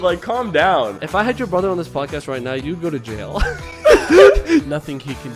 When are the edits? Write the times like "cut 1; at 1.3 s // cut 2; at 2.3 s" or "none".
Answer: cut 1; at 2.6 s // cut 2; at 4.6 s